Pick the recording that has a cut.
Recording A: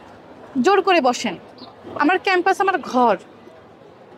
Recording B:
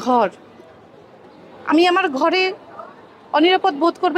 A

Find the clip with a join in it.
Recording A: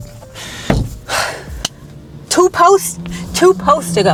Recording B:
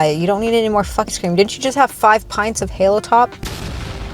B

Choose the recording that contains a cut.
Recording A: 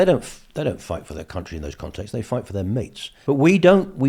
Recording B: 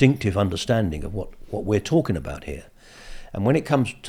A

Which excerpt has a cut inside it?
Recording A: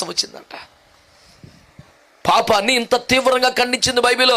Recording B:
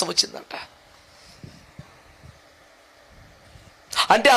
A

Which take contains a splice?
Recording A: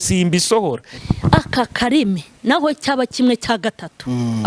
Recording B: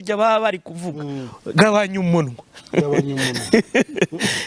A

